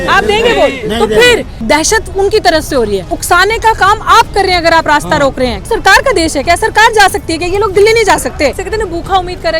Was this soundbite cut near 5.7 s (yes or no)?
yes